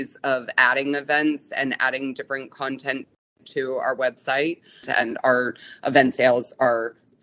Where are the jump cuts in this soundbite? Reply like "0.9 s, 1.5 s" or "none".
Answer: 4.9 s